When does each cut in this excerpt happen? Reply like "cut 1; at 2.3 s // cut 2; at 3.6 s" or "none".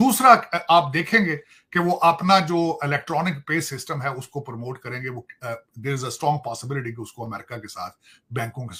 none